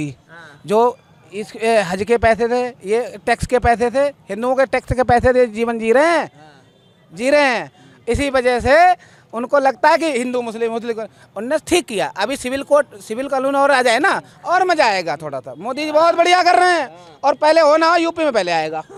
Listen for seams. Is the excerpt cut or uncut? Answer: uncut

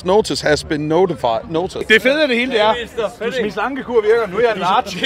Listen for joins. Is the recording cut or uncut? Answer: cut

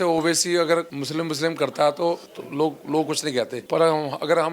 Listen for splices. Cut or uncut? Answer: cut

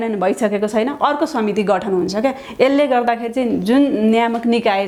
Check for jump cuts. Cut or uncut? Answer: uncut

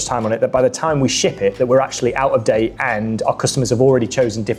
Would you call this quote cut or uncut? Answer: uncut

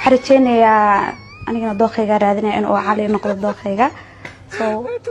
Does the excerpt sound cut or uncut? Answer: uncut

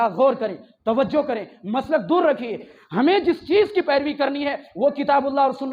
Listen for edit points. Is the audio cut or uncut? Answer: cut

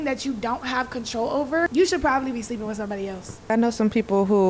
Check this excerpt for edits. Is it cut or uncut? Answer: cut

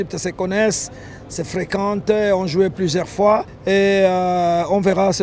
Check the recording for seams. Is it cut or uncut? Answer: cut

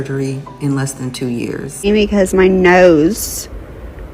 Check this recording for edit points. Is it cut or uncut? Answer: cut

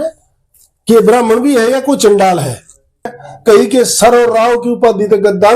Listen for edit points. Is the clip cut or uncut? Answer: cut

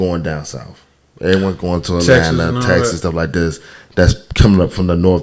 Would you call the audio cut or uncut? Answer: uncut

